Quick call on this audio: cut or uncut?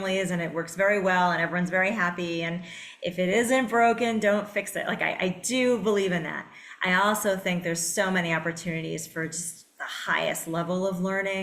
uncut